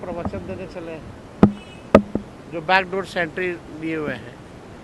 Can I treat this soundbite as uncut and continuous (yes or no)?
yes